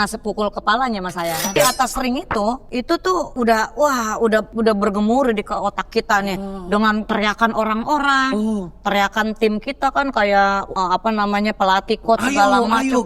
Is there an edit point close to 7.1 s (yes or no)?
yes